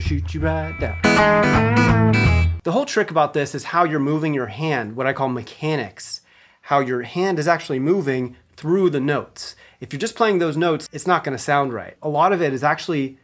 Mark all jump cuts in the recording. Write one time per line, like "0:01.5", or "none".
0:02.6
0:10.8
0:11.9